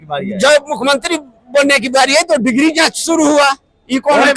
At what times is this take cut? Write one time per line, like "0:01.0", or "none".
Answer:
none